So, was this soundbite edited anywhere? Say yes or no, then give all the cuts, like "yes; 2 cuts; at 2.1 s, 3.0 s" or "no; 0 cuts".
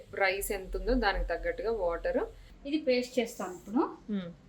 yes; 1 cut; at 2.5 s